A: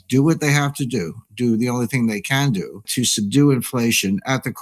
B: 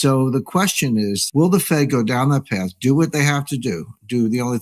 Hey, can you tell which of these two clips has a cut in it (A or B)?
A